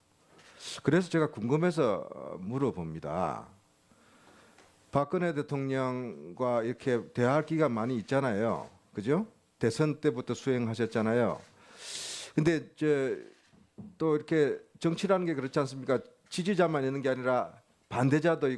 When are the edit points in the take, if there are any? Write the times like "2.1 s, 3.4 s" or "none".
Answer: 3.2 s

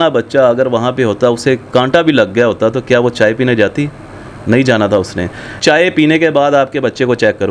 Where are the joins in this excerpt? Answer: 5.5 s

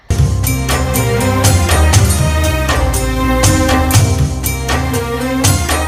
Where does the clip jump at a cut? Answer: none

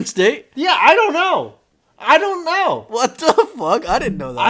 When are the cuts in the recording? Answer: none

